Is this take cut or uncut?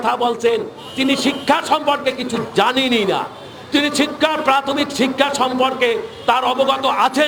uncut